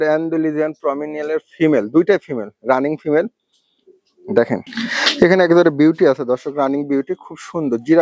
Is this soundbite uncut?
no; 1 cut; at 4.7 s

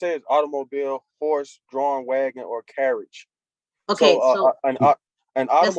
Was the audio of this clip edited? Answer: no; 0 cuts

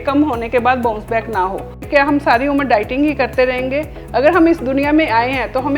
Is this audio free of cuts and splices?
no; 1 cut; at 1.8 s

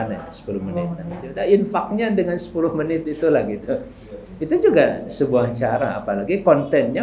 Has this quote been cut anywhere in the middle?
no; 0 cuts

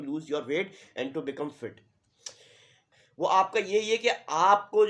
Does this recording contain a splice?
yes; 1 cut; at 2.8 s

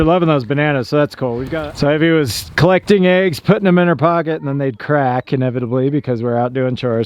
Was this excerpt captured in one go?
no; 1 cut; at 1.5 s

